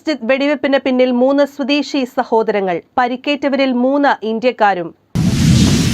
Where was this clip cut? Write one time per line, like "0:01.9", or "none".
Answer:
0:05.0